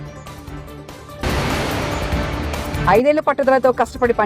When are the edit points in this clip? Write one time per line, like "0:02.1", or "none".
0:01.2
0:02.7